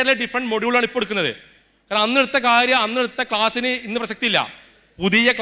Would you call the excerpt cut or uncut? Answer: uncut